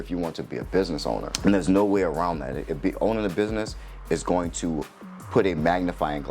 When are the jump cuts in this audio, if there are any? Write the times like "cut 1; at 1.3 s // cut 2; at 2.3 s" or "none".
cut 1; at 1.3 s